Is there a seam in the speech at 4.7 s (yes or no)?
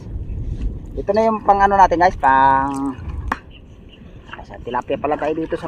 no